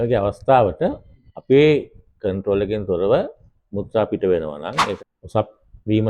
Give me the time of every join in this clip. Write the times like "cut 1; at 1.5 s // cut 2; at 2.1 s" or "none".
cut 1; at 5.0 s